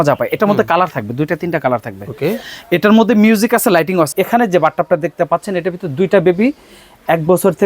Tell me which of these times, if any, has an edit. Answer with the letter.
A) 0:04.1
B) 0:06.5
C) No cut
A